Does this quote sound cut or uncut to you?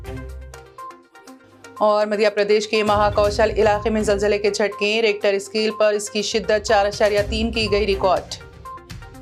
uncut